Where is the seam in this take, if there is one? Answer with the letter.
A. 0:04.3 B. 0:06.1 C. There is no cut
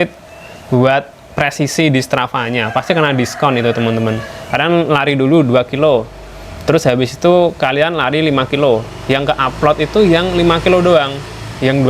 A